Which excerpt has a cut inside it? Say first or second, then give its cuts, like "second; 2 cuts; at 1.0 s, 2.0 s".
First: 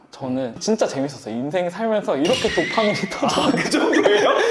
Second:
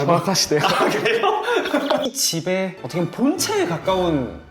second; 1 cut; at 2.1 s